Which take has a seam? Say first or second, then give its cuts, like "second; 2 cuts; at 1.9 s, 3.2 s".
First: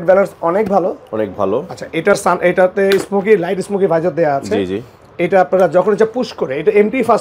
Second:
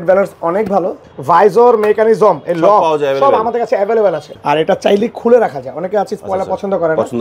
second; 2 cuts; at 1.1 s, 4.3 s